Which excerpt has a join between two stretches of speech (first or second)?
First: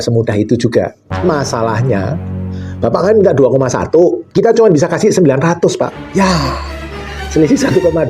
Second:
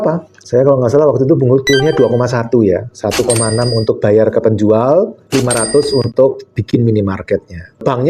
first